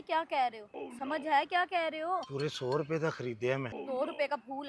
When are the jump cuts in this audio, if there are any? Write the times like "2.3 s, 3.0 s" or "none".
1.0 s, 2.3 s, 3.8 s